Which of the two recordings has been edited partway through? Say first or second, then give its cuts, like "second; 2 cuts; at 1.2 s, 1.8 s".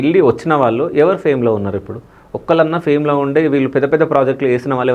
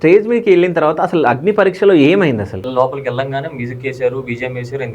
second; 1 cut; at 2.6 s